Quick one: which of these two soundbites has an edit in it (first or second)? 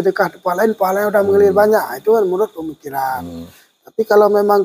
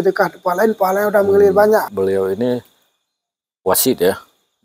second